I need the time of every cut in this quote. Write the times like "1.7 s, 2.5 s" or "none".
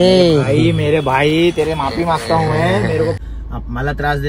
3.2 s